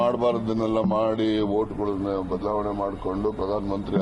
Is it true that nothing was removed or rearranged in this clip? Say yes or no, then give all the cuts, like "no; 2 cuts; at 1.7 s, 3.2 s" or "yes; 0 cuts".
yes; 0 cuts